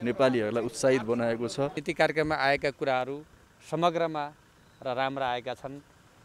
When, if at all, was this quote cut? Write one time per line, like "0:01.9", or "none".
0:01.8